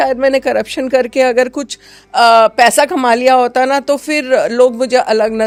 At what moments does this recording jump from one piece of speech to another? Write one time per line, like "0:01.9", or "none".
none